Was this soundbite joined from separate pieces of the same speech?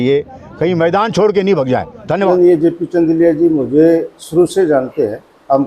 yes; 1 cut; at 2.3 s

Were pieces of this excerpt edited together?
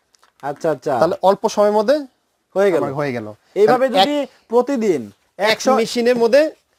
no; 0 cuts

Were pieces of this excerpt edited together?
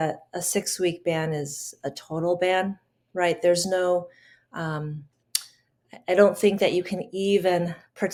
no; 0 cuts

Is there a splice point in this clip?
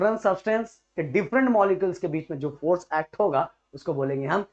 no; 0 cuts

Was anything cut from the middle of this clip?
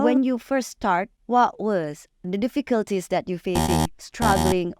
yes; 2 cuts; at 1.2 s, 2.2 s

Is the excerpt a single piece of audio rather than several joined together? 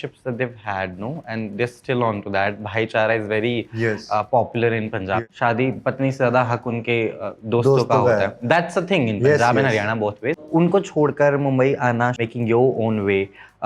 no; 3 cuts; at 5.2 s, 10.4 s, 12.2 s

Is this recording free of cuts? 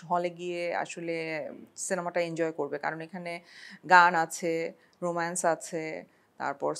yes; 0 cuts

